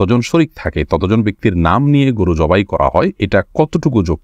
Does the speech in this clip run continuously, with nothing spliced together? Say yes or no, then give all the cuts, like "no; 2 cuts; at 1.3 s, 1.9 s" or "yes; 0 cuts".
no; 1 cut; at 3.2 s